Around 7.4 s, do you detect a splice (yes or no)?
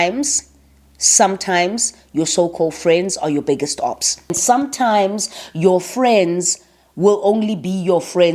no